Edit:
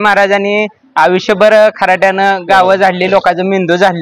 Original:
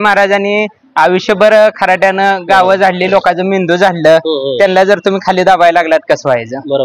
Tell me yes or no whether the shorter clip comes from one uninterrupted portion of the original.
yes